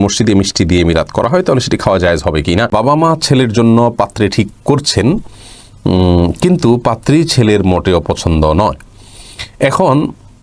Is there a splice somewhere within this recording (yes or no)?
yes